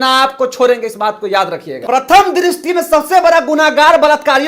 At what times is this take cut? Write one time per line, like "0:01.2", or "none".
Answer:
0:01.7